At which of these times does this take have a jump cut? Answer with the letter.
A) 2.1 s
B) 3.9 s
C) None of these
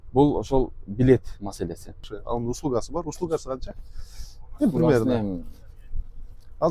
A